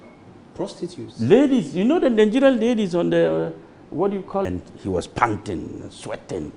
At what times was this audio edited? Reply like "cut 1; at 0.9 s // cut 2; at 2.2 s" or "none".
cut 1; at 4.5 s